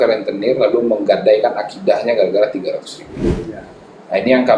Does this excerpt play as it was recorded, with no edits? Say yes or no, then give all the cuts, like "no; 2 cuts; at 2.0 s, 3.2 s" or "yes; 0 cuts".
yes; 0 cuts